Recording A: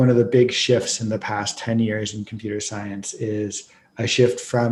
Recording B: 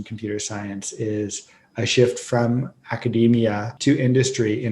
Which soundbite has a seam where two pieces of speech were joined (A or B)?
B